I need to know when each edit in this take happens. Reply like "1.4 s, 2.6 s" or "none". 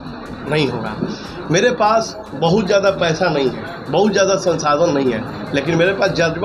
none